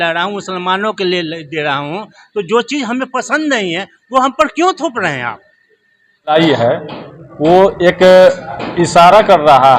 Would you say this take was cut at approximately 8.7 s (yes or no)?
no